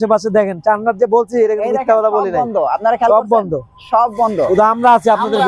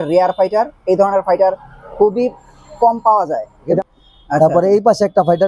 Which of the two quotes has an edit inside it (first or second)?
second